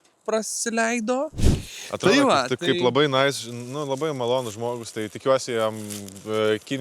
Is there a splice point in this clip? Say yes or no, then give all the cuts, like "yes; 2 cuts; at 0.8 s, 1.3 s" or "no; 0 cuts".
yes; 1 cut; at 1.3 s